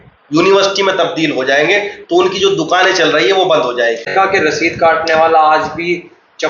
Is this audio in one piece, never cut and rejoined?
no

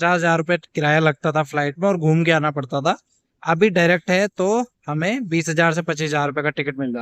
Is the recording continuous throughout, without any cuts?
yes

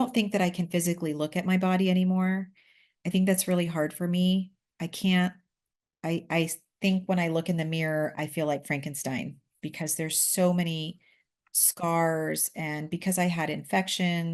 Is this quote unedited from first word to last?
yes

